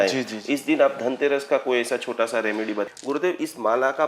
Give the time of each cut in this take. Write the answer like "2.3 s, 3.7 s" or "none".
2.9 s